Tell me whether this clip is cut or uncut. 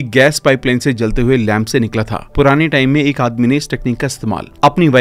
uncut